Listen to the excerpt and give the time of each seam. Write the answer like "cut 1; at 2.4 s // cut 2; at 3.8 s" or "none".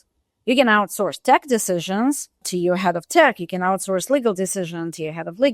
cut 1; at 2.5 s